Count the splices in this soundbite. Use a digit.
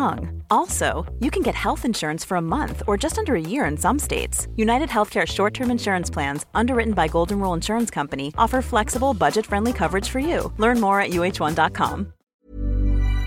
1